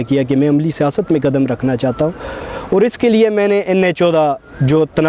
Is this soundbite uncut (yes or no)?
yes